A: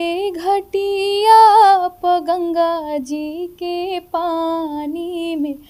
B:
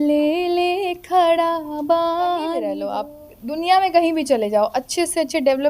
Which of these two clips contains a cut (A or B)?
B